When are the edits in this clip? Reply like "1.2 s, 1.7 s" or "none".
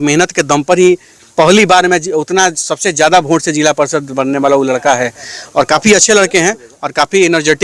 none